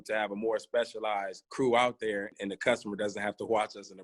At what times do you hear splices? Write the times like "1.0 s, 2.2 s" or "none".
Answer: 1.4 s, 2.3 s